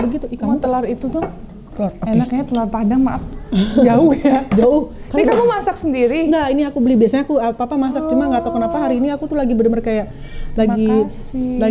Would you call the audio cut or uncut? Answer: uncut